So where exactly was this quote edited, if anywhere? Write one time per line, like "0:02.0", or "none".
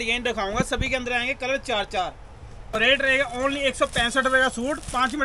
0:02.7